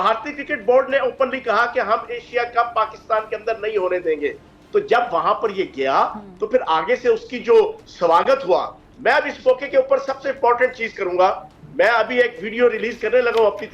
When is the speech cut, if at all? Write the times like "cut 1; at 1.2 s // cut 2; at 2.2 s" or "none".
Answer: cut 1; at 10.9 s